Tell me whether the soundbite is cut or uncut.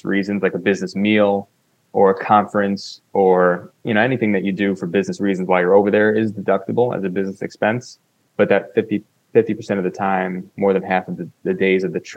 uncut